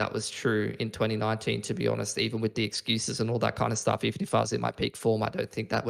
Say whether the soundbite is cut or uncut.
uncut